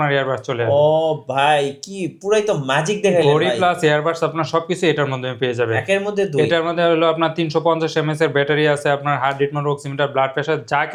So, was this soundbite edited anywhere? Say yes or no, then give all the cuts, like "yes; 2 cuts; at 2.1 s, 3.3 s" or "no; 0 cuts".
no; 0 cuts